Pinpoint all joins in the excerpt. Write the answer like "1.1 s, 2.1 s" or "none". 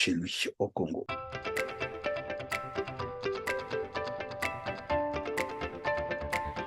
1.1 s